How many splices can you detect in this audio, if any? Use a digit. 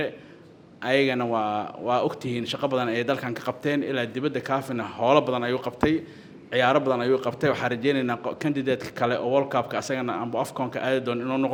0